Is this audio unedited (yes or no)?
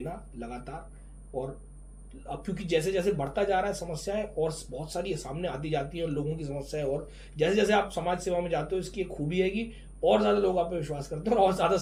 yes